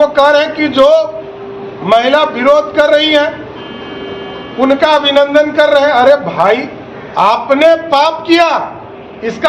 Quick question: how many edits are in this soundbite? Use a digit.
0